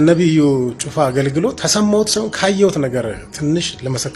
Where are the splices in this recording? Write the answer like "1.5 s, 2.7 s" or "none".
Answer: 1.6 s